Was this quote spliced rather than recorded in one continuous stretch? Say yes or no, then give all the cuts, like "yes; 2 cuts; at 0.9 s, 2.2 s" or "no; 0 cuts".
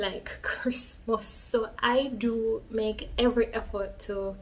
yes; 1 cut; at 1.3 s